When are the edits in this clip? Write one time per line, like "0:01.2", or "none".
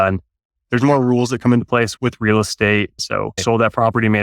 0:03.0